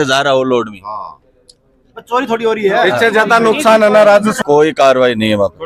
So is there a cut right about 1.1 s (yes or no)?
no